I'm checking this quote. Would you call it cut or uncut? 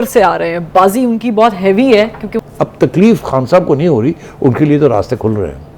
cut